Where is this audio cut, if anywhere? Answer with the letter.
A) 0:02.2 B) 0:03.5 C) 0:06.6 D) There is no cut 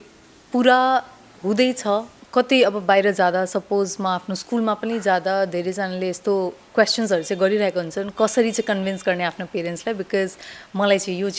A